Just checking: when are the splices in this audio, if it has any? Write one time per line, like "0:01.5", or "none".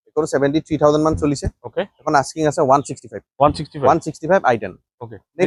none